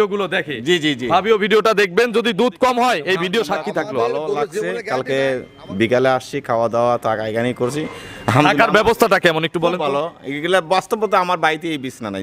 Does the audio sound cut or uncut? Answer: cut